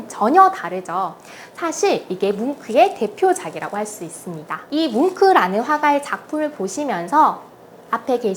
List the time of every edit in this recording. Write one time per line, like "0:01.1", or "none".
0:04.7